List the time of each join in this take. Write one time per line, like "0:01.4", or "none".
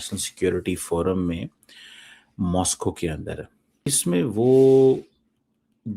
0:04.0